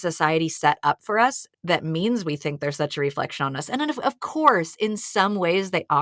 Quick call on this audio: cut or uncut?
uncut